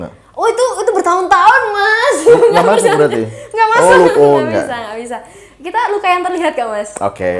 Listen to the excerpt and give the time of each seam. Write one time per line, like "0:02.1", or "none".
none